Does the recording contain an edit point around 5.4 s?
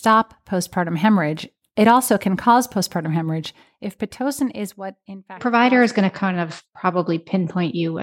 yes; 1 cut; at 5.4 s

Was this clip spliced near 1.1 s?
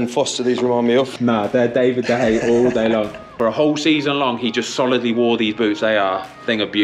yes; 2 cuts; at 1.1 s, 3.3 s

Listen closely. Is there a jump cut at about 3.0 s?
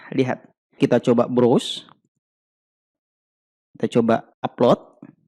yes; 2 cuts; at 0.8 s, 3.0 s

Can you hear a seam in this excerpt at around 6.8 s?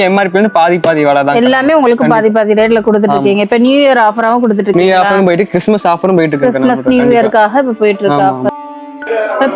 no; 1 cut; at 8.6 s

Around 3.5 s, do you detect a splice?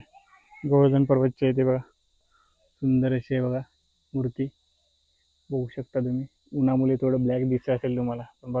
no; 0 cuts

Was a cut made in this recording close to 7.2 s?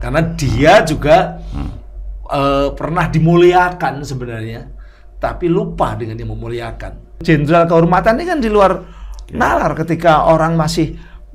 yes; 1 cut; at 7.2 s

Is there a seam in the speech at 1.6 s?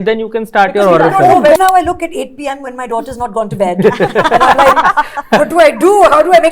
yes; 1 cut; at 1.6 s

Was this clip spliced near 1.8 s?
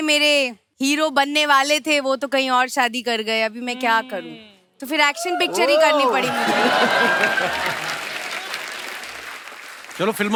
no; 0 cuts

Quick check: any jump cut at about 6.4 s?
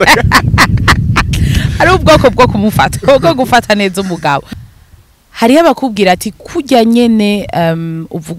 no; 1 cut; at 4.6 s

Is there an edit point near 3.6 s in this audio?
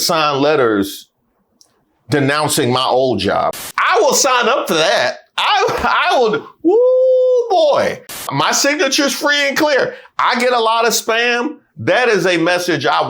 yes; 2 cuts; at 3.6 s, 8.3 s

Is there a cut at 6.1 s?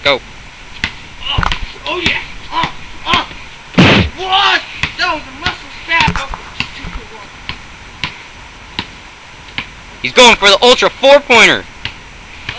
yes; 1 cut; at 6.1 s

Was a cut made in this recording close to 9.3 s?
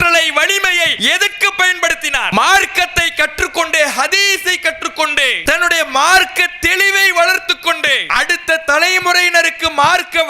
no; 4 cuts; at 0.9 s, 2.3 s, 5.4 s, 8.0 s

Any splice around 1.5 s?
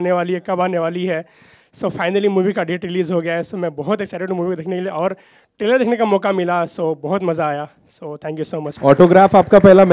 no; 1 cut; at 8.8 s

